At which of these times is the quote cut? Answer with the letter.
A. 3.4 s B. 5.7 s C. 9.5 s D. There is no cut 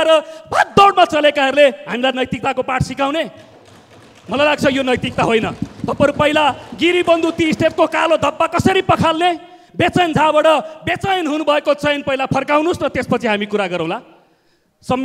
D